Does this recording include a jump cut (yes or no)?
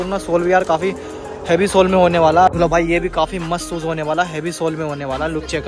yes